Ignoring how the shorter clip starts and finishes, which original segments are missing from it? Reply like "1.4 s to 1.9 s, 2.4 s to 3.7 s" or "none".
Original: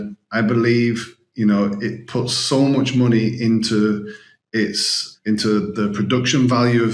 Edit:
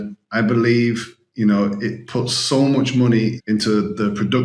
3.4 s to 5.1 s